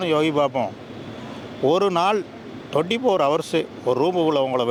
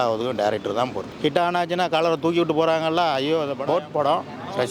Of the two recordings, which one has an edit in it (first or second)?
second